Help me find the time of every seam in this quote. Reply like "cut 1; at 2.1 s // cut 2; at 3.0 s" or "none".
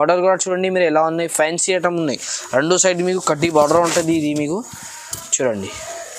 none